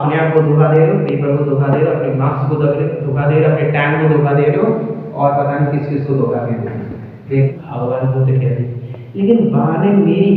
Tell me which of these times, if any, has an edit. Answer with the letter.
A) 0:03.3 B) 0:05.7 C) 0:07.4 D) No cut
C